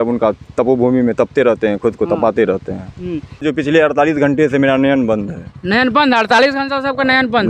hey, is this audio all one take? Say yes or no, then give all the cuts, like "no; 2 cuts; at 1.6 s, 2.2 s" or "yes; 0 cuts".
no; 1 cut; at 3.4 s